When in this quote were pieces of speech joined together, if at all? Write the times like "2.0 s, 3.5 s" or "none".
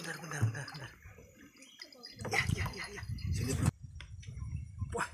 3.7 s